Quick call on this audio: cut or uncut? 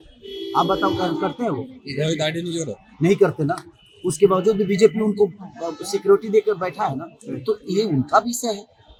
uncut